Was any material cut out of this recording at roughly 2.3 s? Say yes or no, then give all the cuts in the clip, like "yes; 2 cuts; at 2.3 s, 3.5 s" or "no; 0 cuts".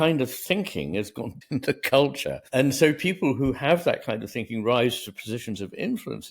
yes; 2 cuts; at 1.4 s, 2.3 s